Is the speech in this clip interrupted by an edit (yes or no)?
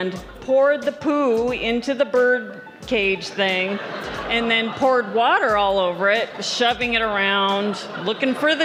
no